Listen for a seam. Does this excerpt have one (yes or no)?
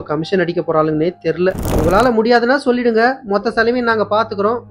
yes